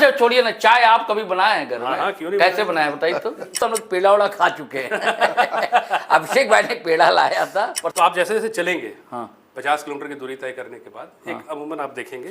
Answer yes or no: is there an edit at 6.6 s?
no